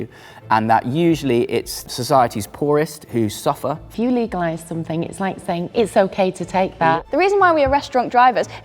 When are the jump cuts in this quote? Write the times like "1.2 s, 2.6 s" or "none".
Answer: 1.8 s, 3.9 s, 6.9 s